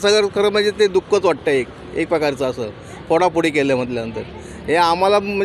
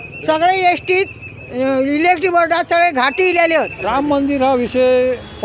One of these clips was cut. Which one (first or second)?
second